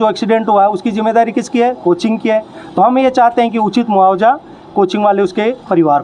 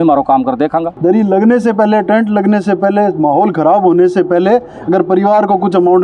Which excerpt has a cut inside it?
second; 1 cut; at 0.9 s

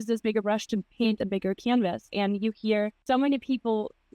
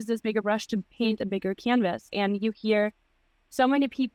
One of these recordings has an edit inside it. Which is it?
first; 1 cut; at 3.0 s

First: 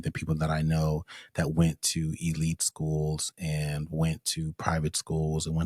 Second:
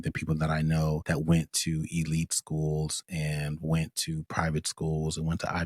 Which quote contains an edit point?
second; 1 cut; at 1.0 s

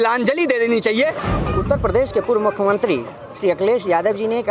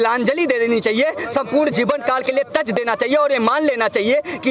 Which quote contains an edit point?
first; 1 cut; at 1.2 s

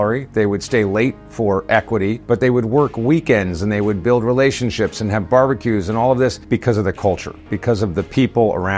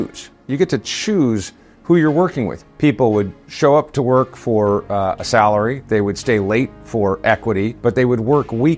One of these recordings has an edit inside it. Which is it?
second; 1 cut; at 2.7 s

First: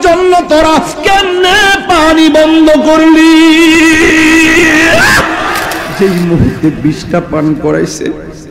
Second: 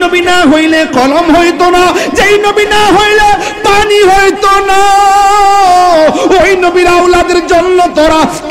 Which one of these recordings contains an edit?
first; 1 cut; at 5.8 s

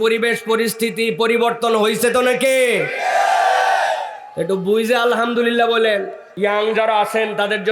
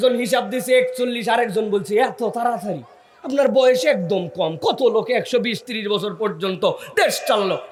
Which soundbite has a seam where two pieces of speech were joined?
first; 1 cut; at 6.2 s

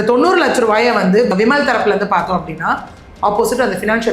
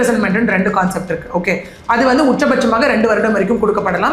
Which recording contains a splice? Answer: first; 1 cut; at 1.3 s

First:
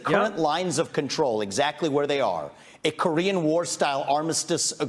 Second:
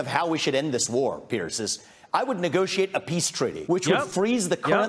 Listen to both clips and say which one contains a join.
second; 1 cut; at 3.6 s

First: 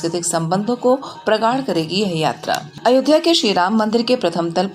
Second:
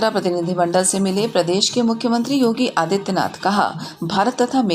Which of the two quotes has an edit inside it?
first; 1 cut; at 2.7 s

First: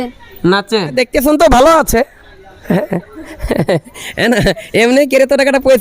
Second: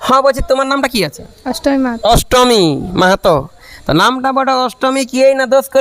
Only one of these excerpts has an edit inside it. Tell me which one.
first; 1 cut; at 0.9 s

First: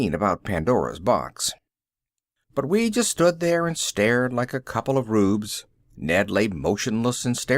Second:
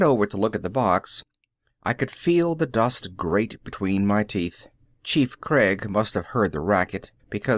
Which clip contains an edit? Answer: second; 1 cut; at 6.0 s

